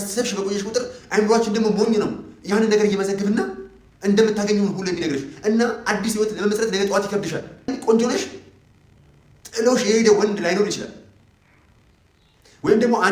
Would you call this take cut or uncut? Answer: cut